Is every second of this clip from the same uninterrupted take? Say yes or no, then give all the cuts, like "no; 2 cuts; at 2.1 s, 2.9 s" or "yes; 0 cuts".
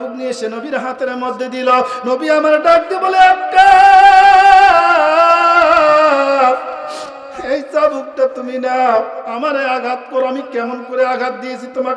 yes; 0 cuts